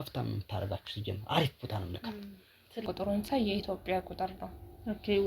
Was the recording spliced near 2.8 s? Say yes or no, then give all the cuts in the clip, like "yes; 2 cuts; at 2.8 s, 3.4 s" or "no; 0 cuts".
yes; 1 cut; at 2.8 s